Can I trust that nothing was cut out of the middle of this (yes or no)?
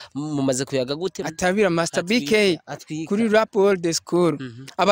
no